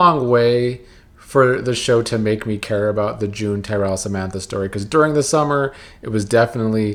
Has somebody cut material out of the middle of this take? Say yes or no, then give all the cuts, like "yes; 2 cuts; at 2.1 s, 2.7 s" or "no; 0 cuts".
no; 0 cuts